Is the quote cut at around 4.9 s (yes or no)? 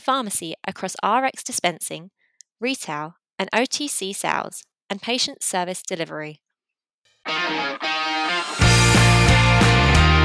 no